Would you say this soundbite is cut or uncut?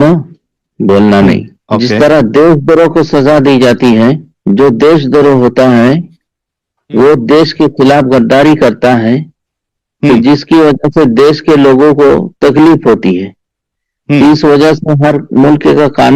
cut